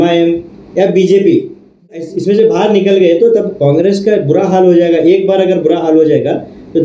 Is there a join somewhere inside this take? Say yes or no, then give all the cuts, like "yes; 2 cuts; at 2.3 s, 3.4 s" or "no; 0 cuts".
yes; 1 cut; at 2.1 s